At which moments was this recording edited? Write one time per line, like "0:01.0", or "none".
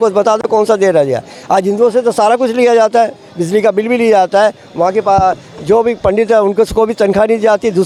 none